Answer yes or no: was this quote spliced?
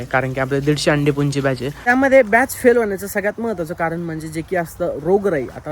yes